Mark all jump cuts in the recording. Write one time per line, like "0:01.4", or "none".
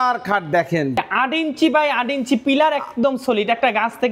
0:01.0